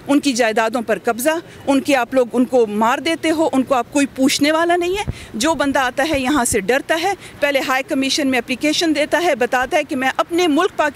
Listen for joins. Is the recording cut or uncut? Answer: uncut